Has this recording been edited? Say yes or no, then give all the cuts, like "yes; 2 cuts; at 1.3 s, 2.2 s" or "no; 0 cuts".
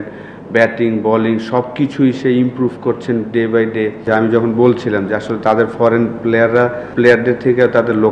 yes; 2 cuts; at 4.0 s, 6.8 s